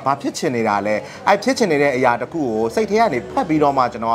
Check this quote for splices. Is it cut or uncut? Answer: uncut